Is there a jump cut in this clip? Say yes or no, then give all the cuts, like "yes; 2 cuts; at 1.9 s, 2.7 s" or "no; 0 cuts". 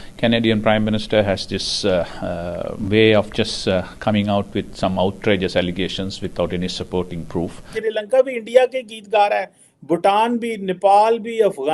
yes; 2 cuts; at 2.8 s, 7.7 s